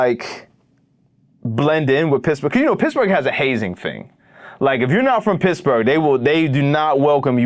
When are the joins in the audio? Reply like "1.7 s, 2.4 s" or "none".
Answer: none